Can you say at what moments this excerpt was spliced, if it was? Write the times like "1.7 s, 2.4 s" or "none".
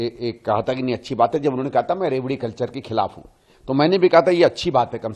none